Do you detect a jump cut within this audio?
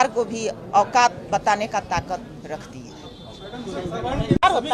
no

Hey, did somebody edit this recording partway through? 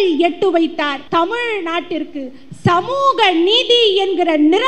yes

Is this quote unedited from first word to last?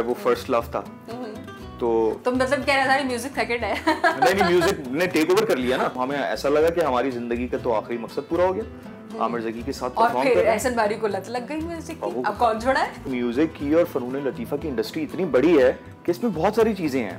no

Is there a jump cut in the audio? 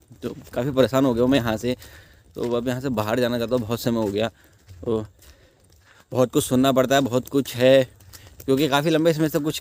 no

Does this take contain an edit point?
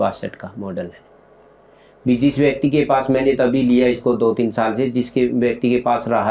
no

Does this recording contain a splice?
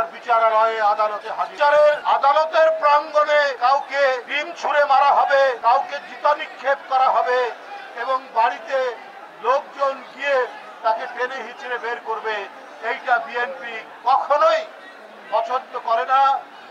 no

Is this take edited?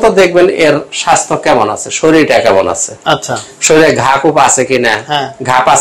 no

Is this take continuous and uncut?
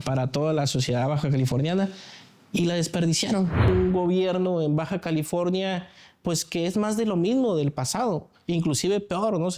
no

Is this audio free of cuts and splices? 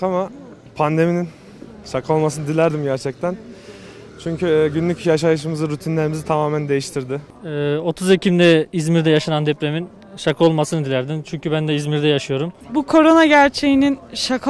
no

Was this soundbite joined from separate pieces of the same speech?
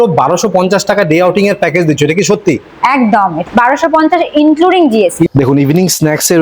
yes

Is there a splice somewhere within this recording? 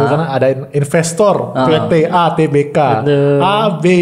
no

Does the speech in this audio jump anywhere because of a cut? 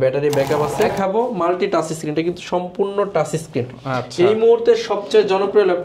yes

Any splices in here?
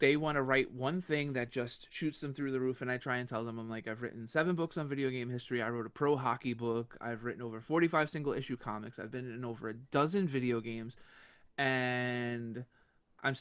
no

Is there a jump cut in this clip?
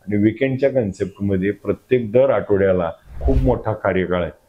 yes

